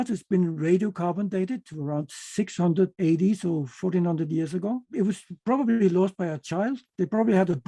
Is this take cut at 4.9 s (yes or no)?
yes